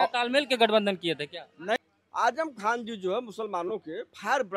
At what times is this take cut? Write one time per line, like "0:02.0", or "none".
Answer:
0:01.8